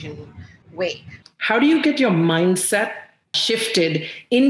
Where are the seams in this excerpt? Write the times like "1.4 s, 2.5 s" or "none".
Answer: 1.2 s